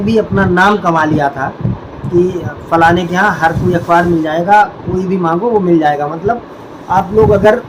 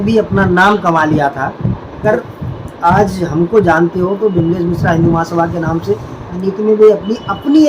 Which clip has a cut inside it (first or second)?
second